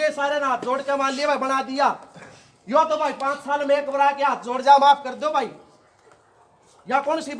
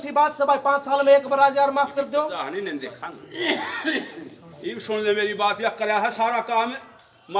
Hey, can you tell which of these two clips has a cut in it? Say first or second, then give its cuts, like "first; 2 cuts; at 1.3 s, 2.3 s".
second; 1 cut; at 2.3 s